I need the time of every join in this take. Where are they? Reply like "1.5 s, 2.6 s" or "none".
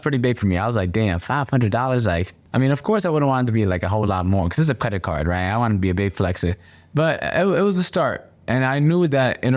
none